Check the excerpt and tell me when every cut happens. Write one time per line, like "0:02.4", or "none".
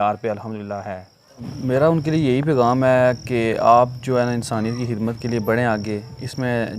0:01.5